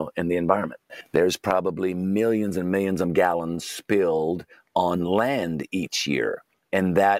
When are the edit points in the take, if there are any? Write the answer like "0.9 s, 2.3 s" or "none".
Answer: 0.9 s